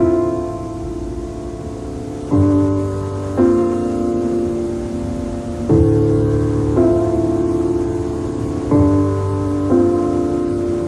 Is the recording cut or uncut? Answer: uncut